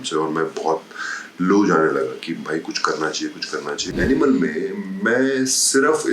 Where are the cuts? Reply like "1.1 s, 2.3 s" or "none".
3.9 s